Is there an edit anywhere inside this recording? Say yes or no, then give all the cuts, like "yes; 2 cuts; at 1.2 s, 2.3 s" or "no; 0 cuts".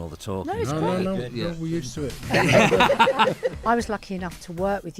yes; 2 cuts; at 2.2 s, 3.6 s